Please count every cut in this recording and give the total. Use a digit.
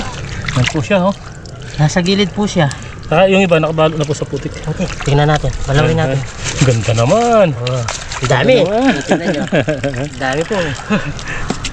1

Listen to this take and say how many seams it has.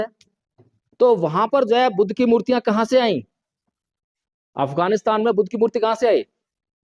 0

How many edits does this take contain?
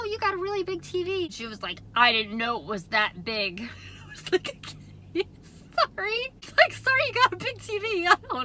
2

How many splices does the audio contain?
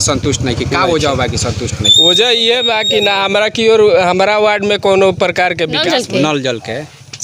1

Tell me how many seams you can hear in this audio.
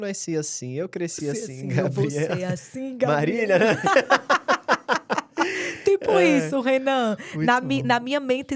0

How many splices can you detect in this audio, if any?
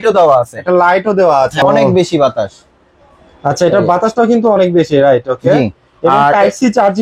1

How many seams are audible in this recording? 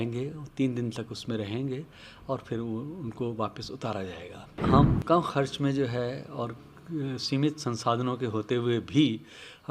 1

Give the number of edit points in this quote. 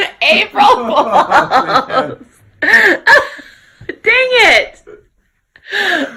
0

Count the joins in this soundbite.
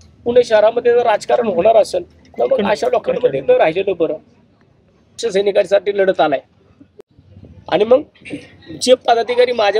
1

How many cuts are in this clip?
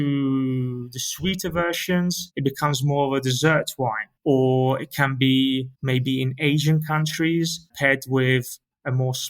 3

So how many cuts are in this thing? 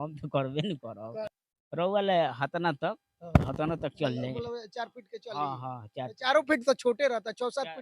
1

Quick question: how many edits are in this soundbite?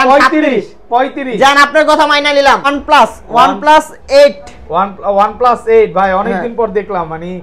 1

